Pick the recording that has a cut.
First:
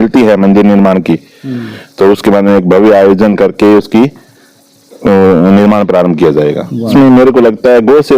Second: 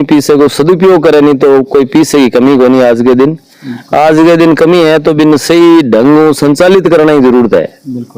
first; 1 cut; at 6.9 s

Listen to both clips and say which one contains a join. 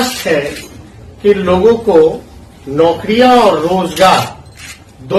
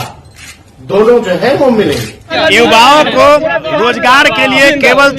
second; 1 cut; at 2.2 s

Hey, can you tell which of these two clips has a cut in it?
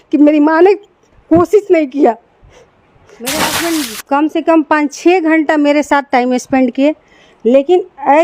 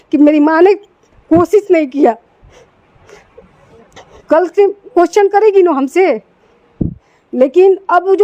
first; 1 cut; at 3.1 s

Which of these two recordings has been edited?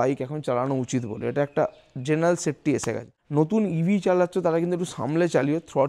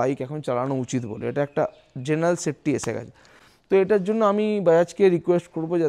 first; 1 cut; at 3.2 s

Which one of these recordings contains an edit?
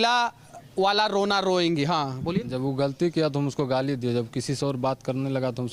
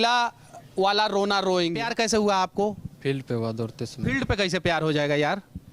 second; 1 cut; at 1.8 s

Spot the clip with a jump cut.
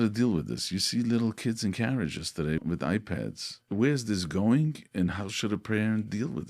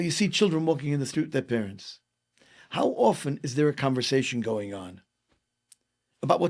first; 2 cuts; at 2.6 s, 3.6 s

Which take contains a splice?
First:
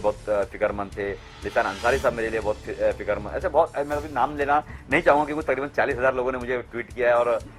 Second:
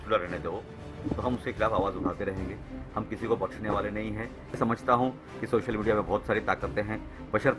second; 1 cut; at 4.6 s

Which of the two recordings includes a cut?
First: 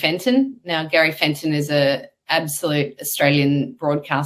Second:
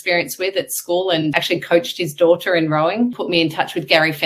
second; 2 cuts; at 1.3 s, 3.2 s

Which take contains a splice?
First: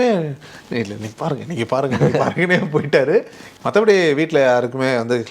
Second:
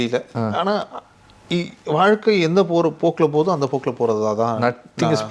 first; 1 cut; at 3.4 s

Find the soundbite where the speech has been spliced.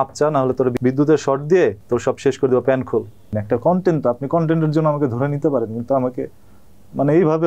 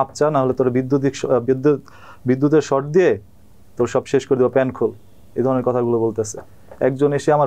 first; 3 cuts; at 0.8 s, 1.8 s, 3.4 s

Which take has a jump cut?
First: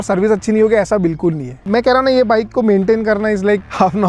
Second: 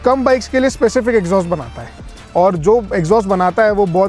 first; 1 cut; at 1.7 s

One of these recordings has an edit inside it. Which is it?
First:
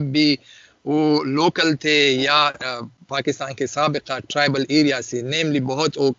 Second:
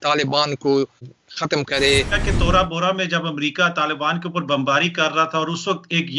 second; 2 cuts; at 1.1 s, 2.2 s

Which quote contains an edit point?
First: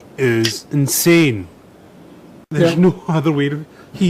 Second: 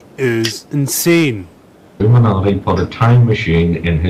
first; 1 cut; at 2.0 s

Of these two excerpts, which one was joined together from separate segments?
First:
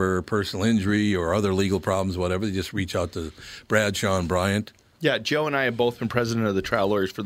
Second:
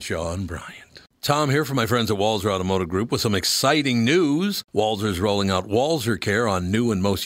second; 1 cut; at 1.1 s

